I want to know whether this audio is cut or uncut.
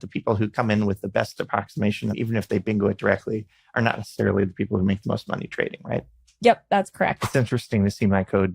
cut